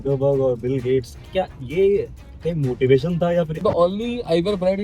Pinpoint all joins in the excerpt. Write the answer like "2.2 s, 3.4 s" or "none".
1.2 s, 3.6 s

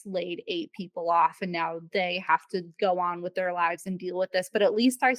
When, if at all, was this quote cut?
none

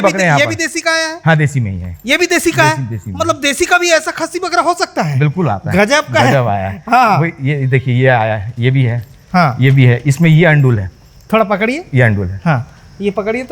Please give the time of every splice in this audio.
none

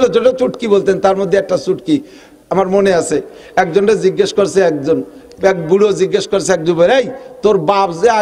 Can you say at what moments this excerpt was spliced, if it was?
none

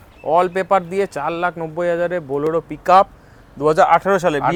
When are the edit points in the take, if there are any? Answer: none

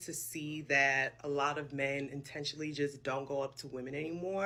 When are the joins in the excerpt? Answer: none

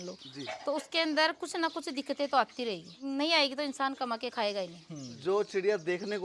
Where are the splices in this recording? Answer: 2.9 s, 5.1 s

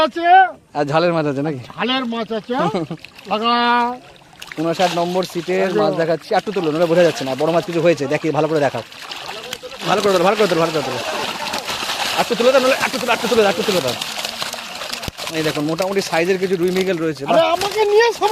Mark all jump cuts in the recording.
none

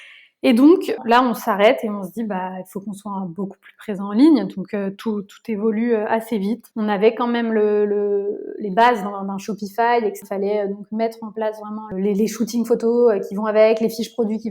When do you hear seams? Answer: 1.0 s, 6.7 s, 10.2 s, 11.9 s

